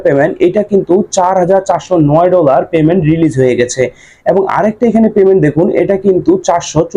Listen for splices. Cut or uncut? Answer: uncut